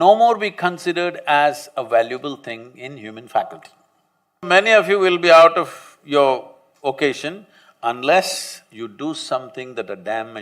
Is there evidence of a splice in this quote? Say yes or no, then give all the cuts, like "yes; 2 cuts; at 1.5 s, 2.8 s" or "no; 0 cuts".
yes; 1 cut; at 4.4 s